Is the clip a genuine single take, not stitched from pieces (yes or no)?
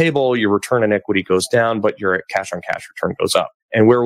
yes